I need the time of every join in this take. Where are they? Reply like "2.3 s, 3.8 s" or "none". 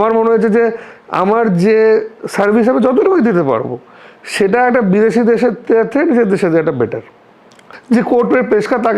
7.6 s